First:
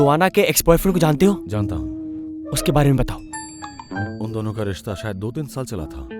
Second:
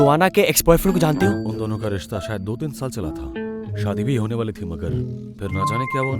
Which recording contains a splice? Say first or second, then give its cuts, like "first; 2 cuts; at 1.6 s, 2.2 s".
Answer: second; 1 cut; at 1.4 s